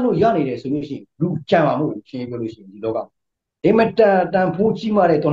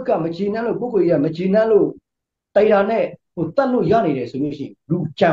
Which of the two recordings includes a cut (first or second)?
first